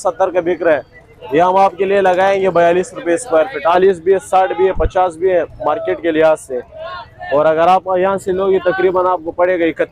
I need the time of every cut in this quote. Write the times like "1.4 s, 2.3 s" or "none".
3.8 s